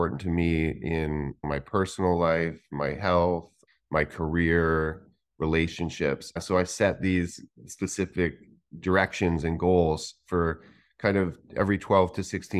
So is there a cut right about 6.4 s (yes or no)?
yes